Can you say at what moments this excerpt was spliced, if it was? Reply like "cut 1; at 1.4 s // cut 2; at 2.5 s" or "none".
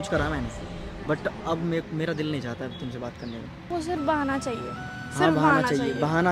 cut 1; at 3.7 s